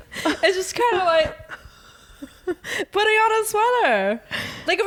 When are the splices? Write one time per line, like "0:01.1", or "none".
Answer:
none

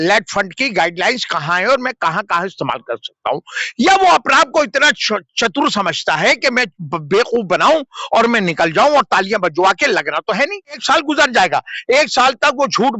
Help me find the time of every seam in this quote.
0:10.8

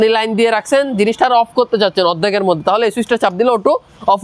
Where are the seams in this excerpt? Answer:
none

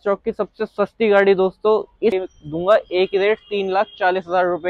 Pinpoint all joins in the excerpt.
0:02.3

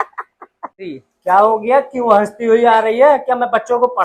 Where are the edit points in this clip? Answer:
none

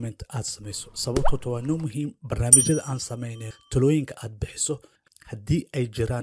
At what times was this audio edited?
none

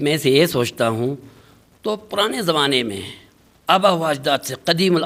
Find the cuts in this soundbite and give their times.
none

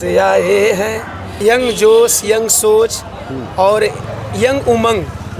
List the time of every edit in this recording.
0:01.4

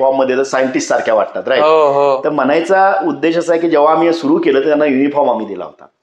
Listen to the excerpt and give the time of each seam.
none

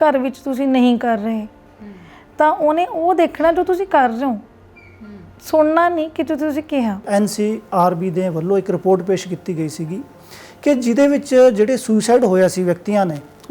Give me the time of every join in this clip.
0:07.0

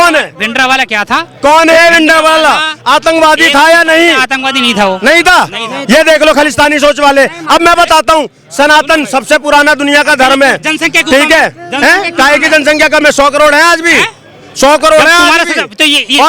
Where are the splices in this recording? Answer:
none

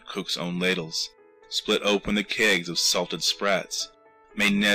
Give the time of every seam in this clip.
0:03.7

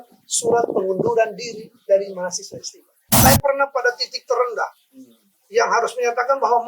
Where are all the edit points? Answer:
0:03.1

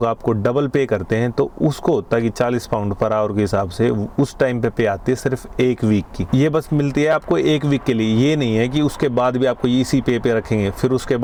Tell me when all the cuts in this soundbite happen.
none

